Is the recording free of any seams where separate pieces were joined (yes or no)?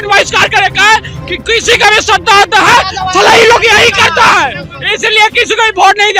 yes